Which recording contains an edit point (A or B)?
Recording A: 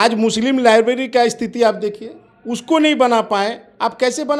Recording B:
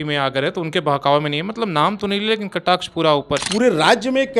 B